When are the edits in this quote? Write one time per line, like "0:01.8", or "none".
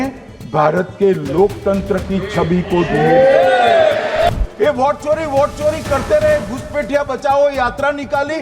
0:04.3